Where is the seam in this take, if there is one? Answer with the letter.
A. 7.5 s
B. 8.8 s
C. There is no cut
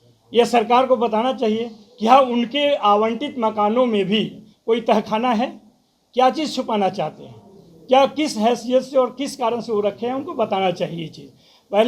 C